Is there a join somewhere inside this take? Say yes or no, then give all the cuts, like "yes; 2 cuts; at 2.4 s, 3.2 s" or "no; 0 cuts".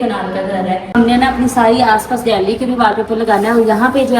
yes; 1 cut; at 0.9 s